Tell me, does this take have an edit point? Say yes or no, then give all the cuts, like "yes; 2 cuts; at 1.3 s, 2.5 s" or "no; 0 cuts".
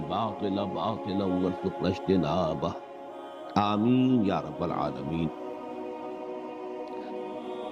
no; 0 cuts